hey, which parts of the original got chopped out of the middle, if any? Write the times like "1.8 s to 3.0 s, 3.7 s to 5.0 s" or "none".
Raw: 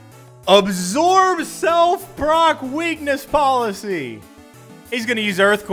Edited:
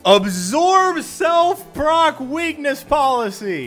none